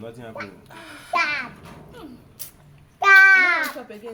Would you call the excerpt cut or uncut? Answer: uncut